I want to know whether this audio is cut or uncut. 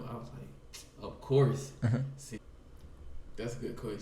cut